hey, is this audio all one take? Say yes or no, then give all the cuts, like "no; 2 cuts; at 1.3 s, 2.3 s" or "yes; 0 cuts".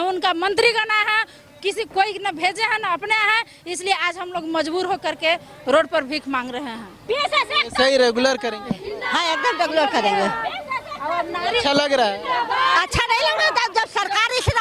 yes; 0 cuts